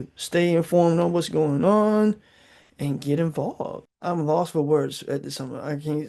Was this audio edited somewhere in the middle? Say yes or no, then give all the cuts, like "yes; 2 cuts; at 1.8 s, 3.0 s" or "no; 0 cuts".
yes; 1 cut; at 3.8 s